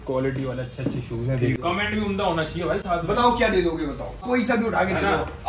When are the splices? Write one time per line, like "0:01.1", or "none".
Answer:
0:01.6
0:04.2